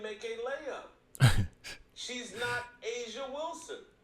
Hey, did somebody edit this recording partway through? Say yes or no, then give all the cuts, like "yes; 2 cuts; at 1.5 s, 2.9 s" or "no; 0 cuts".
no; 0 cuts